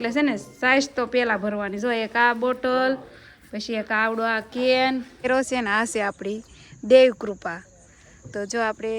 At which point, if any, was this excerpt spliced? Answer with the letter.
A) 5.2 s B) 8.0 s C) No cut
A